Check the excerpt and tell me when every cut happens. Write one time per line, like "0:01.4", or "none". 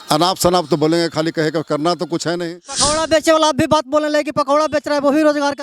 0:02.9